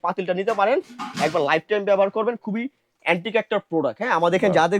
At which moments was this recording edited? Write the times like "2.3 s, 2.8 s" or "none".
none